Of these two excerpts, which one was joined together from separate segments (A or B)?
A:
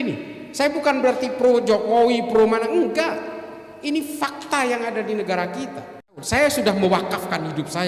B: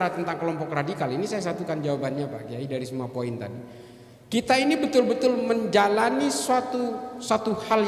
A